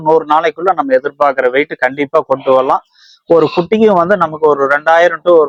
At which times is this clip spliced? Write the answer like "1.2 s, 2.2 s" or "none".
none

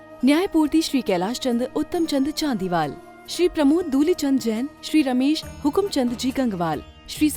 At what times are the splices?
none

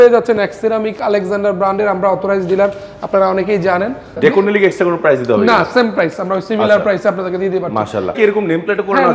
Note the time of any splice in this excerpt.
4.1 s, 8.2 s

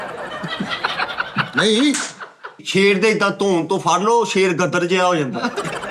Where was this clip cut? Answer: 2.6 s

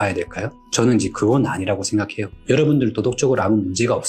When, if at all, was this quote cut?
2.3 s

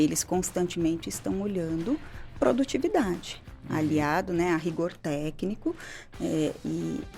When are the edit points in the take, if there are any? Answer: none

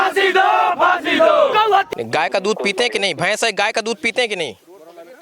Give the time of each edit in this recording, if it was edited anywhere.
2.0 s

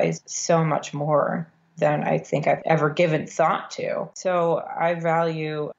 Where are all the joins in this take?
2.6 s, 4.1 s

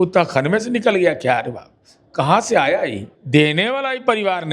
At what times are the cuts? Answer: 3.1 s

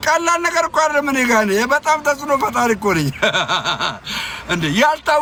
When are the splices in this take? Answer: none

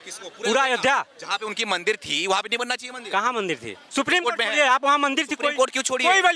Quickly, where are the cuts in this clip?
3.8 s

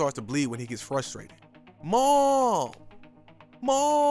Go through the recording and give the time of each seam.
1.7 s

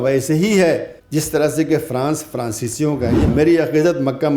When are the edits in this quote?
1.0 s, 3.3 s

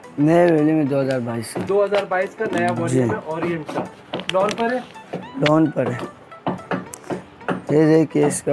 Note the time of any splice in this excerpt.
6.2 s

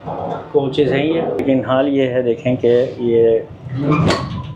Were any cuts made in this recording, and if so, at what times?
1.4 s

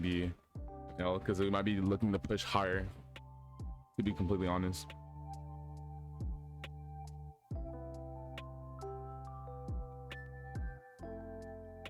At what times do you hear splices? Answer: 4.9 s

